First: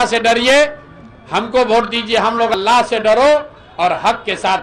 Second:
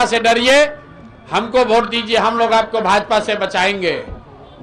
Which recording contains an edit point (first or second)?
first